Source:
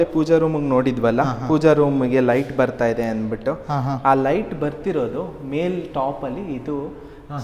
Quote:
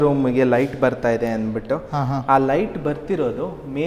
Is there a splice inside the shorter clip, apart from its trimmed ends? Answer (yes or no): no